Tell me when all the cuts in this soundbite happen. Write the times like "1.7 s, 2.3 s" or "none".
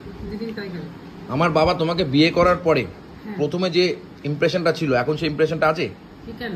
none